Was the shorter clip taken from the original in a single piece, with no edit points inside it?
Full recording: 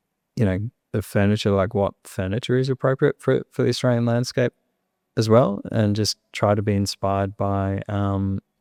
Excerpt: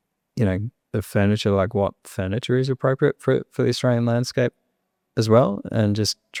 yes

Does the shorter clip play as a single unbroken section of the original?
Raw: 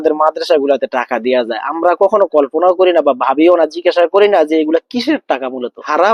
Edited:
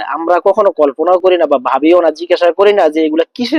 yes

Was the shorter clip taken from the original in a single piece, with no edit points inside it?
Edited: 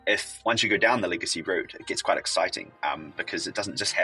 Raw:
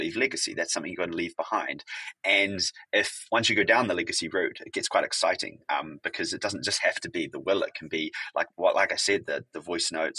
yes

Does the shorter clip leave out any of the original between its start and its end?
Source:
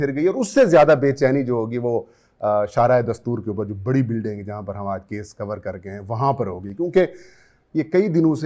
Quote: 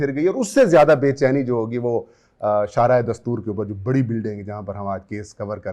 no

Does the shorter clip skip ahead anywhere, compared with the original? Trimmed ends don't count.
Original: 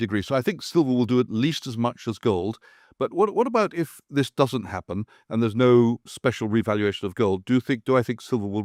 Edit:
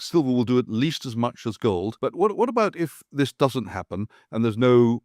yes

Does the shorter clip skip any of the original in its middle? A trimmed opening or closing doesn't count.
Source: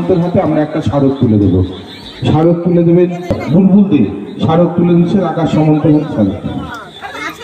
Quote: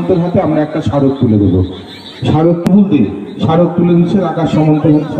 yes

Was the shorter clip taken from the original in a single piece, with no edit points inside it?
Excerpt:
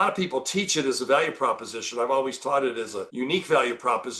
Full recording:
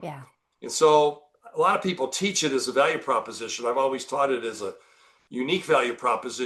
no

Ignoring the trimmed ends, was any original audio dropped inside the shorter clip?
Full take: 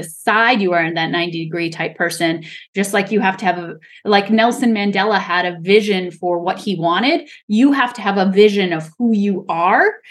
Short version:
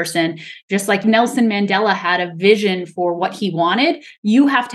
yes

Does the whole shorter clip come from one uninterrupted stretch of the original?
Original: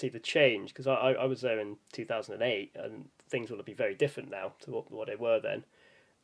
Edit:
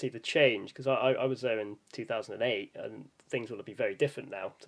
yes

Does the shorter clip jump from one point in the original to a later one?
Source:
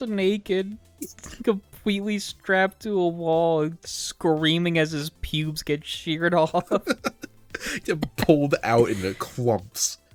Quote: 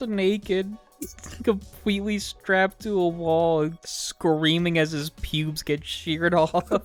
no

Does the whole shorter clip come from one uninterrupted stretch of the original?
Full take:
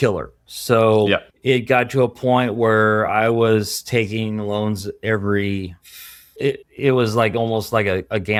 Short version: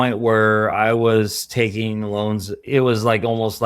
no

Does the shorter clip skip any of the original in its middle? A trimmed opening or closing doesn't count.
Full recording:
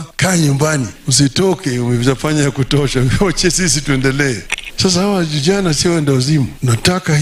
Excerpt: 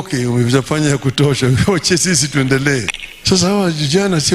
no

